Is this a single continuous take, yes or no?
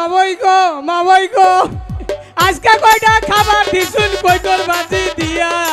yes